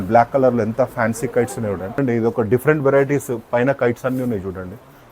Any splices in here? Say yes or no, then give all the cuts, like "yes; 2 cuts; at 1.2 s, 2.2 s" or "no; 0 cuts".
yes; 1 cut; at 2.0 s